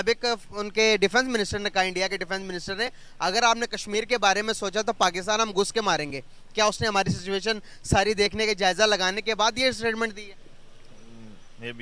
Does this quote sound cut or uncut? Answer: uncut